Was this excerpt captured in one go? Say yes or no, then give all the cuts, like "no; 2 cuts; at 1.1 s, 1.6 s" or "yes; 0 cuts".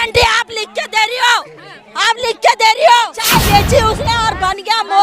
no; 1 cut; at 3.2 s